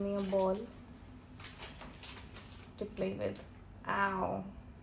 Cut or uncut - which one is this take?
uncut